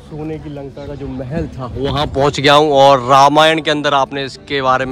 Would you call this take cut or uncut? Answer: uncut